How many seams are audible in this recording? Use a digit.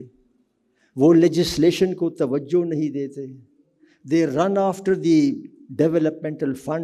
0